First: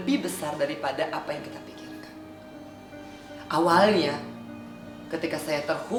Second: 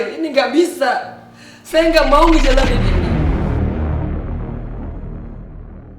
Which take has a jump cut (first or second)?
second